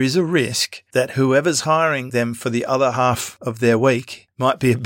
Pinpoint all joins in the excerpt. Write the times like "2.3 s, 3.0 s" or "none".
2.0 s